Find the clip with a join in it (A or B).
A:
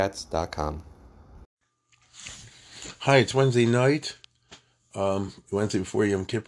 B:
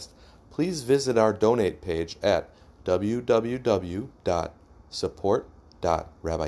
A